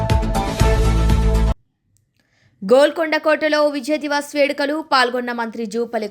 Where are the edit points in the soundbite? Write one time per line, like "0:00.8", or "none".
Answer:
0:01.5